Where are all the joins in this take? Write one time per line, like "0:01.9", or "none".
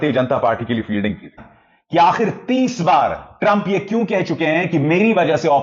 0:01.4

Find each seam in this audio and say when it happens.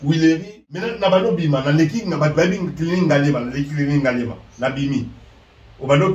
0:00.9

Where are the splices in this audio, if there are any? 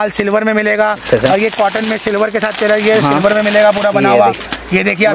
none

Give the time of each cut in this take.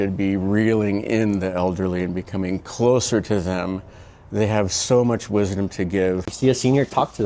0:06.3

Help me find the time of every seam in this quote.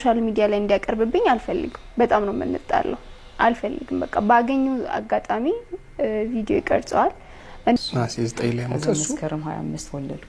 0:07.8

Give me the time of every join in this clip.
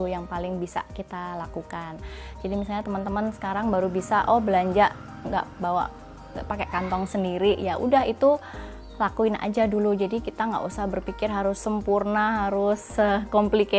none

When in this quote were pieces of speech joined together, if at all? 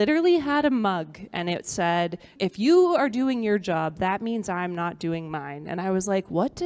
0:02.3

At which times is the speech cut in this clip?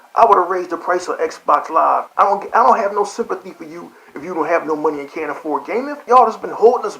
0:02.1
0:06.0

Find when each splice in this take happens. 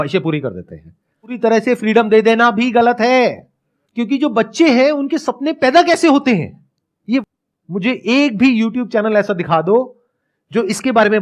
0:01.3
0:07.2

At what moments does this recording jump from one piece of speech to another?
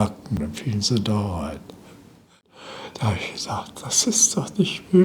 0:02.6

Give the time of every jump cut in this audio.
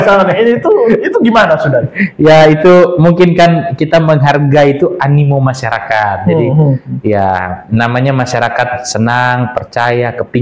none

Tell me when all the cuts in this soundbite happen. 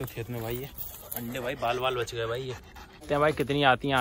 0:03.0

